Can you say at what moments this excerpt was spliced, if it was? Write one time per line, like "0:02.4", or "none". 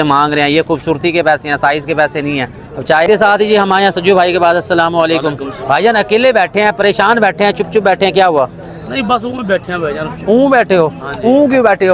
0:03.1